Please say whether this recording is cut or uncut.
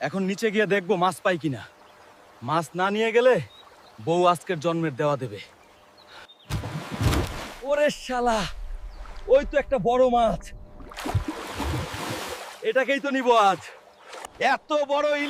uncut